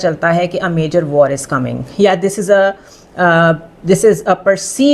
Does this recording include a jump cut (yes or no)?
no